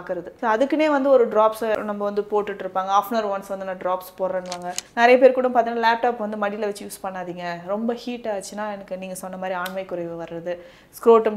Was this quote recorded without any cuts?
no; 1 cut; at 4.8 s

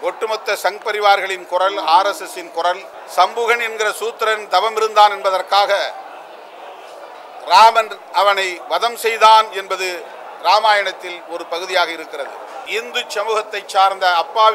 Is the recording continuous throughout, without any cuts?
no; 2 cuts; at 2.9 s, 12.6 s

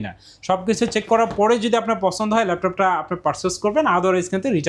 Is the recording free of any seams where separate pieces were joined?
yes; 0 cuts

